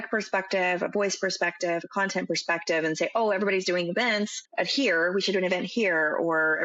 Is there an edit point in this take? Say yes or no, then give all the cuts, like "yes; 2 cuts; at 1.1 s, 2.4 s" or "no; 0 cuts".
yes; 1 cut; at 4.4 s